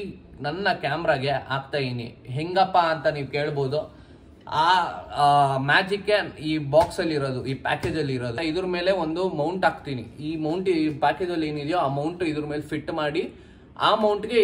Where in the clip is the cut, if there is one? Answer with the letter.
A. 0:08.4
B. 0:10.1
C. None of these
A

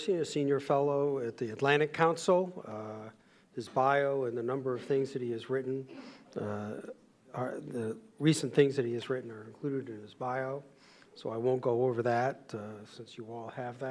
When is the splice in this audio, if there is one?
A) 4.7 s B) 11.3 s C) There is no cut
B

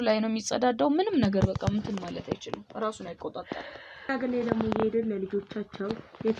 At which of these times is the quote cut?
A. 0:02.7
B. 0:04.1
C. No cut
B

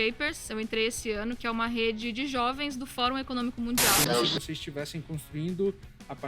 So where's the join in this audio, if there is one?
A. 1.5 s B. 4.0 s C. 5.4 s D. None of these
B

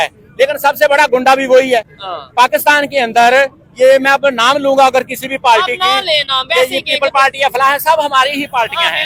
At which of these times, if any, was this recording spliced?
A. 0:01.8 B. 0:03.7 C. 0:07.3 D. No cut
D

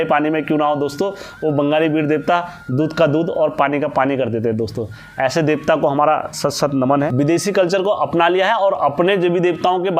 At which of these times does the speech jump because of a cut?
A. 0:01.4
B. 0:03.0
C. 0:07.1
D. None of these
C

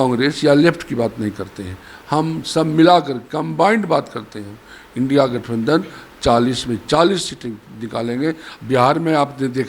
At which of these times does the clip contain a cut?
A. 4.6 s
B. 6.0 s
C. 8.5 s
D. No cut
C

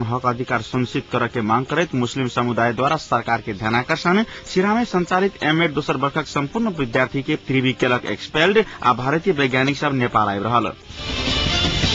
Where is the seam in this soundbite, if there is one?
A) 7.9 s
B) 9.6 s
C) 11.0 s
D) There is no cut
C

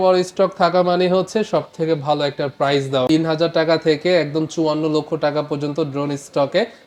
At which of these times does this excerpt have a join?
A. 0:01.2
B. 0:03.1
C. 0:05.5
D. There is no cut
B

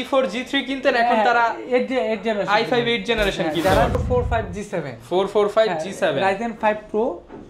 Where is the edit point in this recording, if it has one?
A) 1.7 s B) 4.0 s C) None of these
B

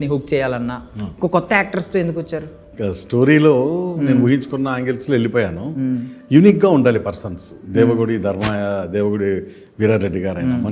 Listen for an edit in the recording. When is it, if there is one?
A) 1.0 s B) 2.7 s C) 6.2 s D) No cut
B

